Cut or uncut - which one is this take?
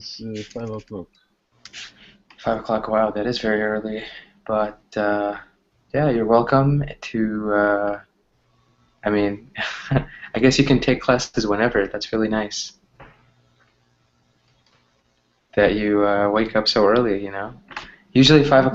uncut